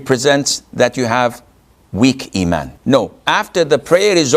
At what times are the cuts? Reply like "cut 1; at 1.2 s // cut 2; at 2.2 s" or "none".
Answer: cut 1; at 2.7 s